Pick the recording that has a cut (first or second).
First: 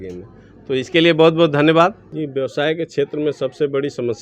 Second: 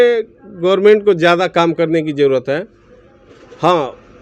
first